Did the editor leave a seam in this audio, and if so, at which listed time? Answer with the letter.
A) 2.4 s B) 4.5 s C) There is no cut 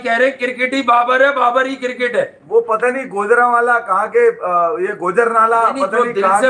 C